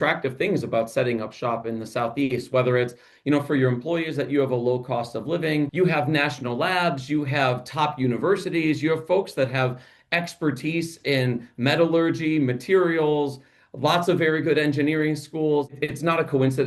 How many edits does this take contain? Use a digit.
2